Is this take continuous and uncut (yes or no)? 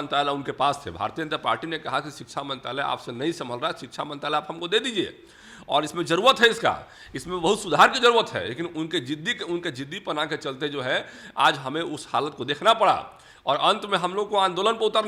yes